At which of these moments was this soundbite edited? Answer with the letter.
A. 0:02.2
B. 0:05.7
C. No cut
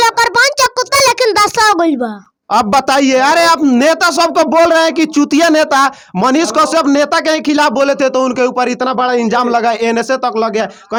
C